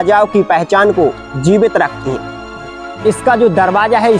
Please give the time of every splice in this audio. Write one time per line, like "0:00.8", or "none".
0:02.6